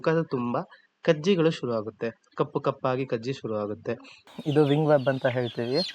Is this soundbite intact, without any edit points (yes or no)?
no